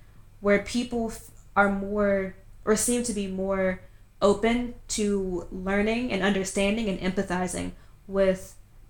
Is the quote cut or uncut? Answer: uncut